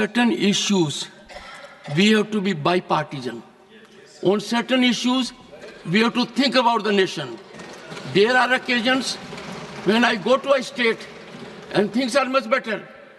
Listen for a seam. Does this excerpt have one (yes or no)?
no